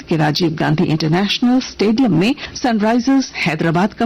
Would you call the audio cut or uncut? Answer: cut